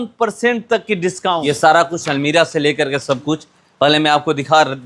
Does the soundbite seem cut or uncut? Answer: cut